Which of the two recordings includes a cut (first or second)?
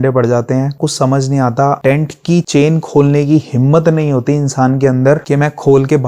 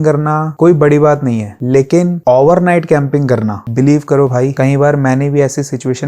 second